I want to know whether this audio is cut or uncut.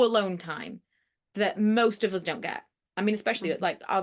uncut